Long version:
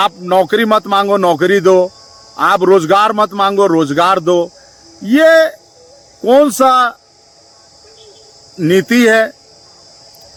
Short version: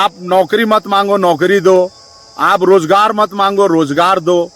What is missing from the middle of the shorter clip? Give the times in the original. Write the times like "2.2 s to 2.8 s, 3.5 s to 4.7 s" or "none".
none